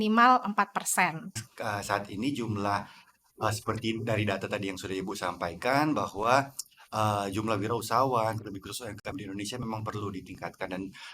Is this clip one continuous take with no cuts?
no; 1 cut; at 1.5 s

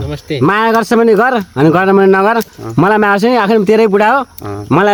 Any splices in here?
no; 0 cuts

